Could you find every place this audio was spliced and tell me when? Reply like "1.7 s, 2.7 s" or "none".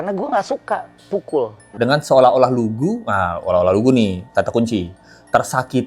1.7 s